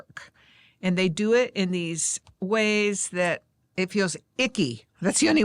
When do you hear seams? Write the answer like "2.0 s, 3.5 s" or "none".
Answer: 3.8 s